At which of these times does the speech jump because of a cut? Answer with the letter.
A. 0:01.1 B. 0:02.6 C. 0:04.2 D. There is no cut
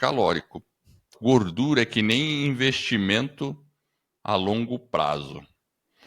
A